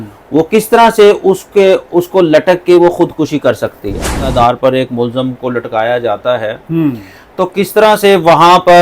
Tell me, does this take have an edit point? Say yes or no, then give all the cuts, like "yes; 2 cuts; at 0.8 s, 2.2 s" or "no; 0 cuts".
yes; 1 cut; at 4.2 s